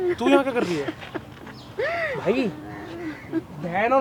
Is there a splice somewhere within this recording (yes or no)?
no